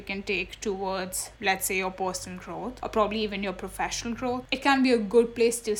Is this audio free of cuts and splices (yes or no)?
no